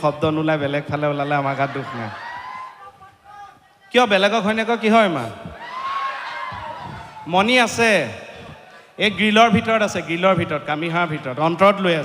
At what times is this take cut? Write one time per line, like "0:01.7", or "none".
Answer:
0:02.4